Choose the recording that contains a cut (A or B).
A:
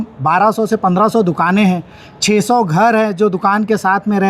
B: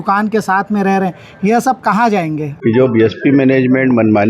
B